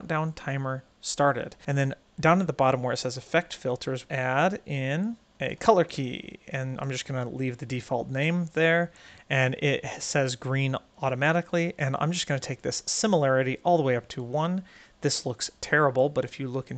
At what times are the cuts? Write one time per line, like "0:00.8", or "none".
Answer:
0:01.5
0:04.0
0:05.3